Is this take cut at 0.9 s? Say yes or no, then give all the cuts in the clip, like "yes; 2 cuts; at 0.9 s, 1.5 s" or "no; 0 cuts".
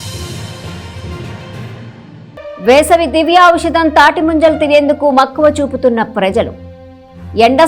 no; 1 cut; at 2.5 s